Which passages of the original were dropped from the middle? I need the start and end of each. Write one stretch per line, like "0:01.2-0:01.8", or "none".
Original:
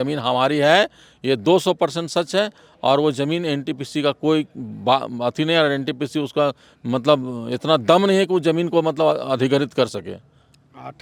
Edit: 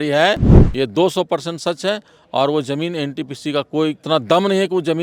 0:04.5-0:07.6